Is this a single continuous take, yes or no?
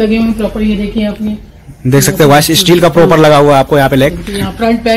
yes